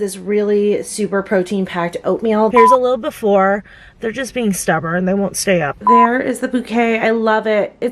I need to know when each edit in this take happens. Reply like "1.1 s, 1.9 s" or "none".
2.5 s, 5.8 s